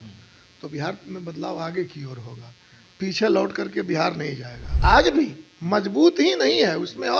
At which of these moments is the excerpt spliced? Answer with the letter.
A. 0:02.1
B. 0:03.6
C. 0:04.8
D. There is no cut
C